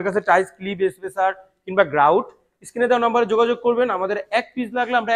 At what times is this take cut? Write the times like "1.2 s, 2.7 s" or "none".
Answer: none